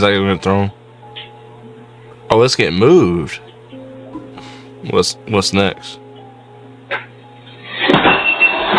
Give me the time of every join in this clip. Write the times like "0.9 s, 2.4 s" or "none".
1.1 s, 4.0 s